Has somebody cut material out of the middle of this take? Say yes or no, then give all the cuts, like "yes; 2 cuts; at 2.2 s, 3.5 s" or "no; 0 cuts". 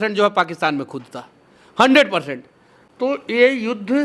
no; 0 cuts